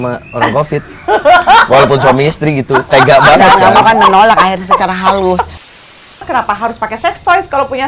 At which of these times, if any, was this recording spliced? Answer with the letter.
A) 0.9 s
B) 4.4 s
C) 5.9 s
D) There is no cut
C